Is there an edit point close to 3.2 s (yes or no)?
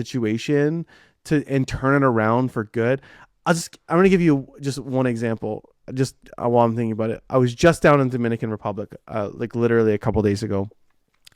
no